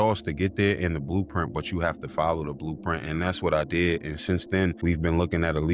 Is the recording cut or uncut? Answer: uncut